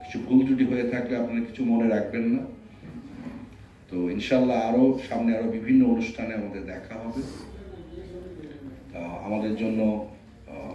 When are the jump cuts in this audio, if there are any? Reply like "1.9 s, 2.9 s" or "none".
none